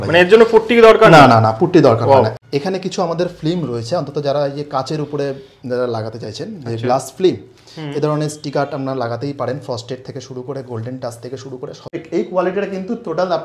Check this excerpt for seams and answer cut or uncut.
cut